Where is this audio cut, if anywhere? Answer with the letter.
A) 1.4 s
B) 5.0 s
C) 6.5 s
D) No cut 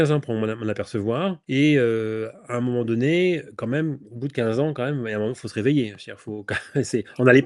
A